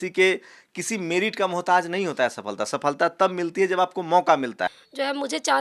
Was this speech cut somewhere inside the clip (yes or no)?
yes